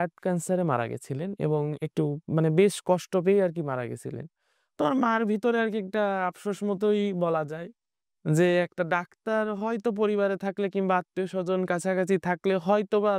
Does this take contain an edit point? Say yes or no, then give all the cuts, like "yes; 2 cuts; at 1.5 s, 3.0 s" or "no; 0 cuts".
no; 0 cuts